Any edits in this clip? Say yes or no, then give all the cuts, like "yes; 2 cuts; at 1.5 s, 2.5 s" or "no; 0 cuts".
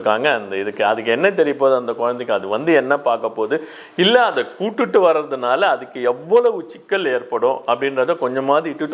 no; 0 cuts